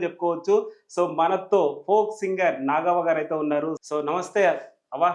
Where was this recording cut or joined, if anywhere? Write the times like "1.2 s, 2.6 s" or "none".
3.8 s